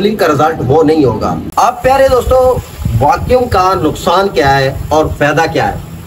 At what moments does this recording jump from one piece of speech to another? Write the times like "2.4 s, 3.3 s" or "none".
1.4 s

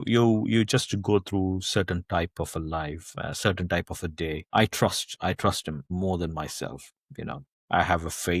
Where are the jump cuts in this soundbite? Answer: 5.8 s, 7.5 s

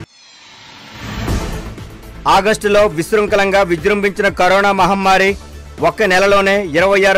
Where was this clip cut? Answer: 2.0 s

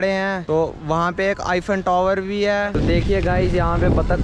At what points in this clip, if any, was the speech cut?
2.7 s

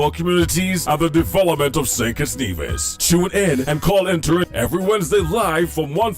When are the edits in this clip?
4.5 s

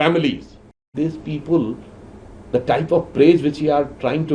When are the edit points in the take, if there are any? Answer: 0.9 s

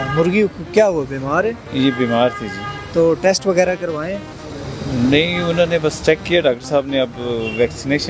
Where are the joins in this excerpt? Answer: none

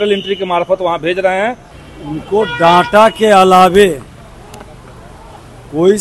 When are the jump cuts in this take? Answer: 1.7 s

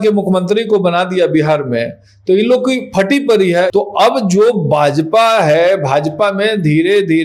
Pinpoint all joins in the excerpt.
none

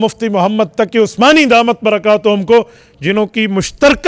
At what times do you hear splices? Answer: none

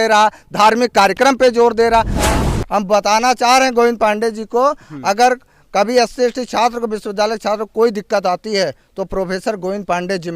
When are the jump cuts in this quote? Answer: 2.2 s

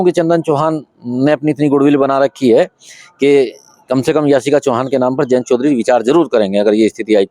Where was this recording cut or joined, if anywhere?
none

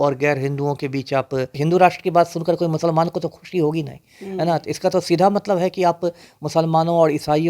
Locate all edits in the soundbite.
1.6 s

